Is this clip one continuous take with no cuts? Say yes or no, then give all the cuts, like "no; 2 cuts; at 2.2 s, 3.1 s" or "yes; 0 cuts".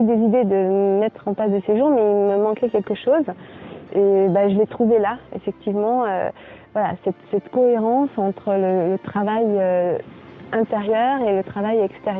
yes; 0 cuts